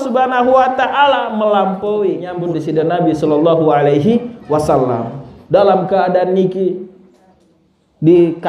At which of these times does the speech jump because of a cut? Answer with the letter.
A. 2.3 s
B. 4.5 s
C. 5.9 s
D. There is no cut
A